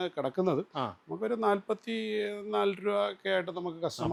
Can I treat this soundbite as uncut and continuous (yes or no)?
yes